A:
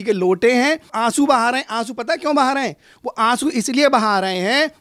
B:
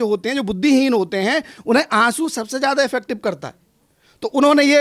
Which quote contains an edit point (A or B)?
A